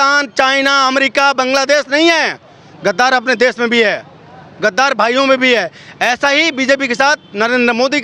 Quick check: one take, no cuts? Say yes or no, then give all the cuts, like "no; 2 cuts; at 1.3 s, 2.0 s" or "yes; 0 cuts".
yes; 0 cuts